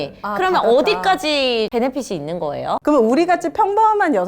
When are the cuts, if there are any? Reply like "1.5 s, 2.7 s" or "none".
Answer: 1.7 s, 2.8 s